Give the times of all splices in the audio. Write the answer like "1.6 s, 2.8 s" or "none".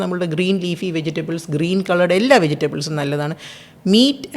none